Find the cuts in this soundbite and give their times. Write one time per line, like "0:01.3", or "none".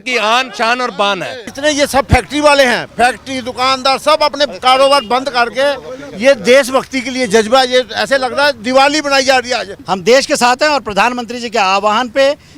0:01.4
0:09.7